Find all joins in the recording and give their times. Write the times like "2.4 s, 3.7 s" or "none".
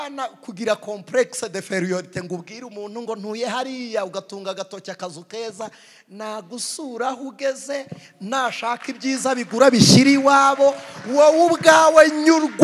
none